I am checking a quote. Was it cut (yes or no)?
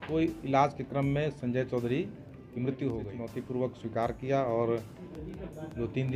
yes